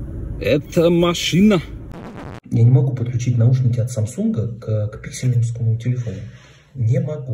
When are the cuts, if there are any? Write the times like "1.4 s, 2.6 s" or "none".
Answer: 2.0 s